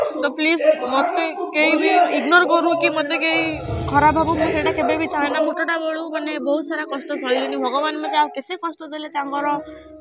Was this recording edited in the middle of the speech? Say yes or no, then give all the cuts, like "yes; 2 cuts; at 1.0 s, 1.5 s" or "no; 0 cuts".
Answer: yes; 1 cut; at 5.3 s